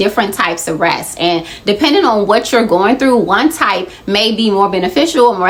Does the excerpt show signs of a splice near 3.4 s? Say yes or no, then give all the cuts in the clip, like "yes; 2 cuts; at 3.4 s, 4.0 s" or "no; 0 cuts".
no; 0 cuts